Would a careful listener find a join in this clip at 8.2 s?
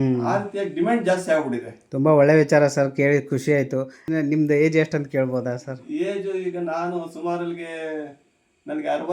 no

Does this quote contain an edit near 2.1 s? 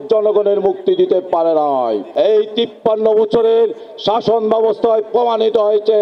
yes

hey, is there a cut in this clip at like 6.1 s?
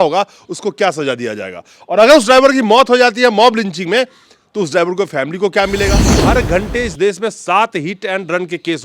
yes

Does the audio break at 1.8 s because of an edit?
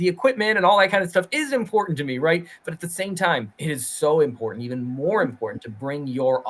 no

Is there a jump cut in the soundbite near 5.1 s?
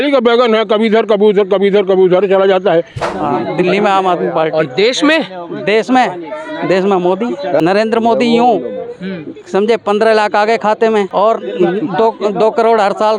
no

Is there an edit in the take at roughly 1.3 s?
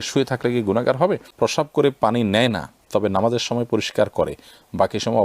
yes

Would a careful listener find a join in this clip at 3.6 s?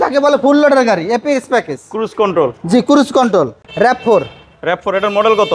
yes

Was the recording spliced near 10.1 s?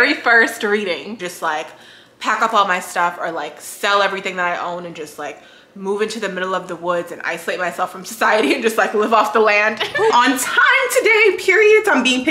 yes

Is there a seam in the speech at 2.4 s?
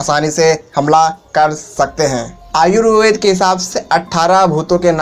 yes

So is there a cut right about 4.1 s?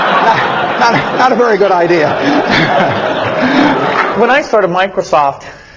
yes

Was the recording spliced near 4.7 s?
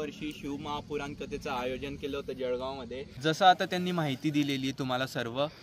no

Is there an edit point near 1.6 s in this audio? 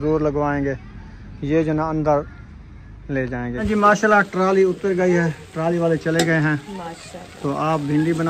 no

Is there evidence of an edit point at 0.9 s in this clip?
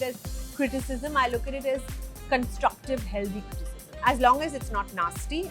no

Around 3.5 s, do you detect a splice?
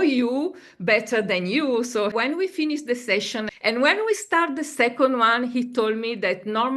yes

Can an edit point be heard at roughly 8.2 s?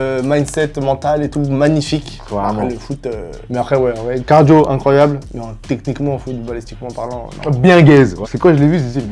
yes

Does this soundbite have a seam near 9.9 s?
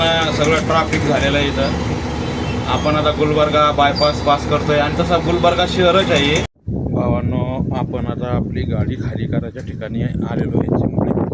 no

